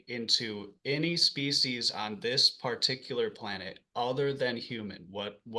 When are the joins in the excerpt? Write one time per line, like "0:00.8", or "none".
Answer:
none